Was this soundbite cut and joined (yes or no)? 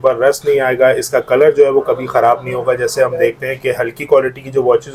no